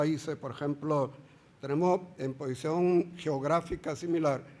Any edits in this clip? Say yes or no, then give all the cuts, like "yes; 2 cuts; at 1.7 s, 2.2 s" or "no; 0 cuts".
yes; 1 cut; at 2.7 s